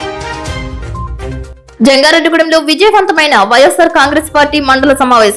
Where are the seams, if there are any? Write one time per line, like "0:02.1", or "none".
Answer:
none

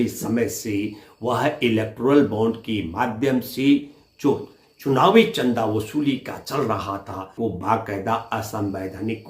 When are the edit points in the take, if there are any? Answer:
0:07.3

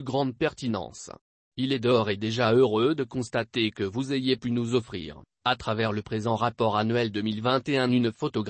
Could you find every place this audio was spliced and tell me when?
0:06.9

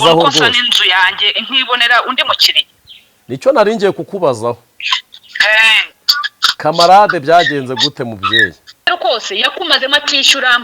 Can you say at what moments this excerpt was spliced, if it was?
0:08.9

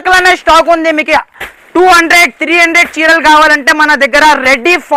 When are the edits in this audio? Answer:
none

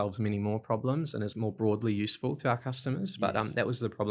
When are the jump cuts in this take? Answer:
0:01.3

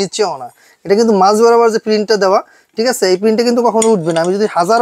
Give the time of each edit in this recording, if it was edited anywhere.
none

